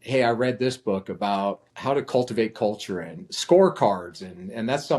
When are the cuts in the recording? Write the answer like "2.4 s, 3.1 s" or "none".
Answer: 1.7 s